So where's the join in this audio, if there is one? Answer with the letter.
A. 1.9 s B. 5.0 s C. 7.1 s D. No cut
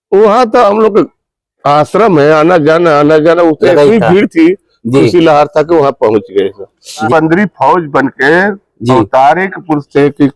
C